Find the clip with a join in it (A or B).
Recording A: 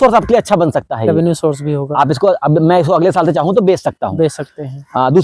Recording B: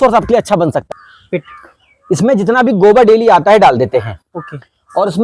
B